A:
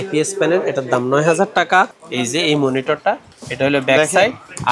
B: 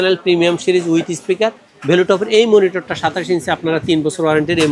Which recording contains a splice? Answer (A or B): A